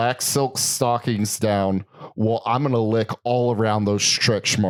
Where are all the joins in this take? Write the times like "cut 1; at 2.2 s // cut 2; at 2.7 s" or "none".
none